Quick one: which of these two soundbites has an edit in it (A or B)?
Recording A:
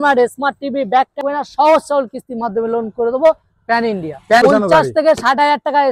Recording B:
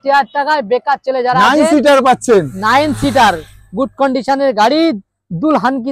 A